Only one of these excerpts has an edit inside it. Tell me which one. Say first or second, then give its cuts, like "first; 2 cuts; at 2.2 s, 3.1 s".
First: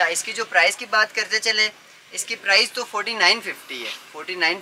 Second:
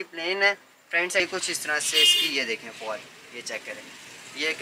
second; 1 cut; at 1.2 s